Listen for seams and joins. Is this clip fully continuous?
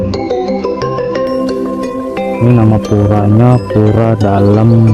yes; 0 cuts

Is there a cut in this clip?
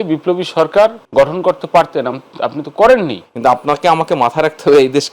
yes; 2 cuts; at 1.0 s, 3.2 s

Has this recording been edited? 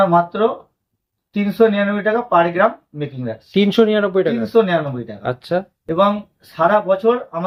no; 0 cuts

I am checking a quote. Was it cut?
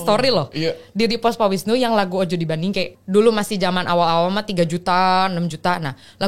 yes; 1 cut; at 3.0 s

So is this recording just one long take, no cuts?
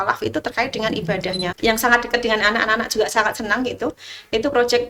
no; 1 cut; at 1.5 s

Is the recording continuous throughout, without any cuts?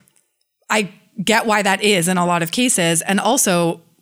yes; 0 cuts

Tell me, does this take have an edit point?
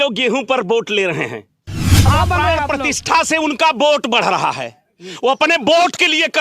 yes; 1 cut; at 2.1 s

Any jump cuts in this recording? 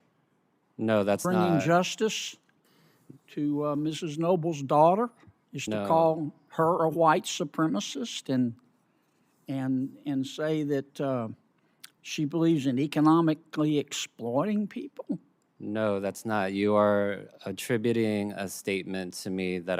no; 0 cuts

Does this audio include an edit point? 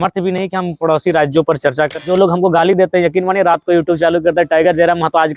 yes; 1 cut; at 2.0 s

